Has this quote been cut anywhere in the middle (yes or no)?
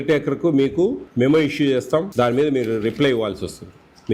yes